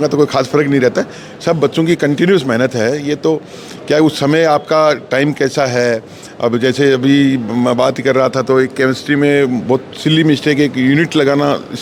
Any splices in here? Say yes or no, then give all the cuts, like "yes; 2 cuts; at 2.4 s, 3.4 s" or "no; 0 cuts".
no; 0 cuts